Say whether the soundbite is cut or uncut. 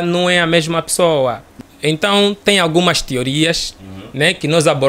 cut